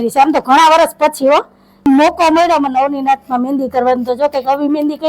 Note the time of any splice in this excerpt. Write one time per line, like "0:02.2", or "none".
0:01.8